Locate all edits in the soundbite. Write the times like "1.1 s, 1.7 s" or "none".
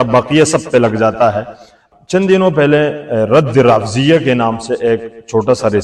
1.7 s